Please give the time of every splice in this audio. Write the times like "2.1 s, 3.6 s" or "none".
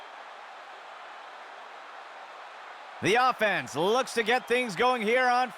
1.3 s, 3.0 s